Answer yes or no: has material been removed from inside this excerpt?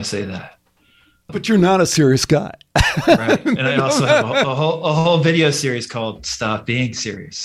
yes